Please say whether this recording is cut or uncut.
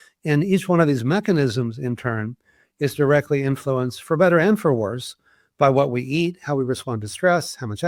uncut